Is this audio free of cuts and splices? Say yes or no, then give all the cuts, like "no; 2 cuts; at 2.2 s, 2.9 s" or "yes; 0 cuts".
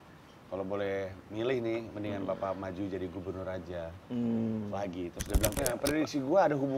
no; 1 cut; at 5.5 s